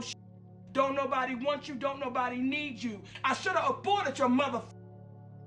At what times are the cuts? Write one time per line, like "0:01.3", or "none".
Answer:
0:03.1